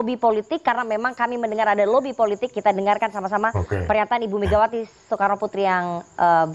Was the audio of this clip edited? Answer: no; 0 cuts

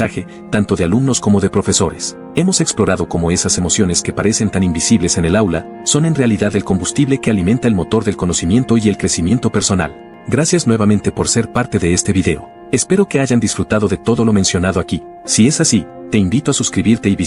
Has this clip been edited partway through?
yes; 1 cut; at 10.1 s

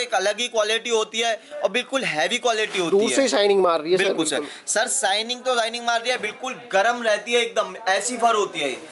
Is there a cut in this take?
no; 0 cuts

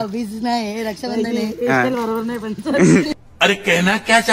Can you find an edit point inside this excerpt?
yes; 1 cut; at 3.1 s

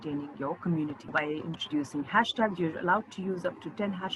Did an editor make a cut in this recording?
yes; 1 cut; at 1.1 s

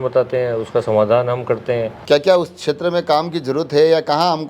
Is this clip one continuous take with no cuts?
no; 1 cut; at 1.9 s

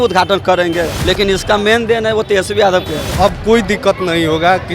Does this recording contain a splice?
yes; 2 cuts; at 1.0 s, 3.1 s

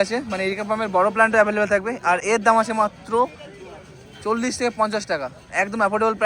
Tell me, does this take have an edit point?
no; 0 cuts

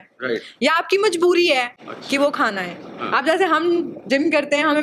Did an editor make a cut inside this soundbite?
no; 0 cuts

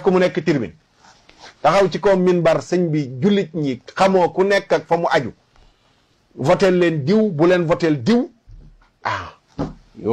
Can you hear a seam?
no; 0 cuts

